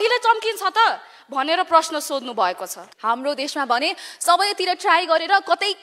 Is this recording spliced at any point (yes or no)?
yes